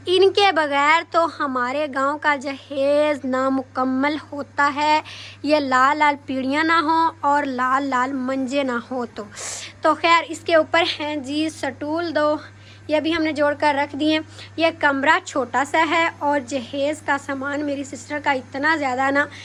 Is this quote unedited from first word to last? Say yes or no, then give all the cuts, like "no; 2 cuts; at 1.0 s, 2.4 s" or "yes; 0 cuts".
yes; 0 cuts